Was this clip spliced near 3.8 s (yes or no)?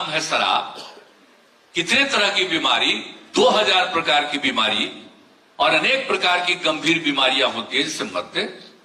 no